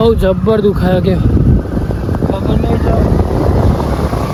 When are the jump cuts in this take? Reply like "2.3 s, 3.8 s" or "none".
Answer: none